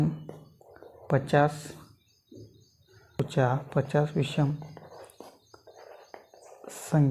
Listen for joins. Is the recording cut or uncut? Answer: cut